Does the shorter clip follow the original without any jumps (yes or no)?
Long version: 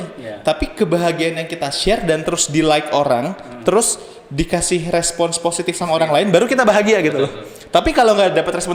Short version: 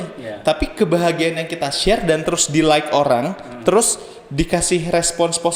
yes